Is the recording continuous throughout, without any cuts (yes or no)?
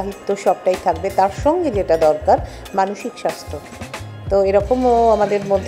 yes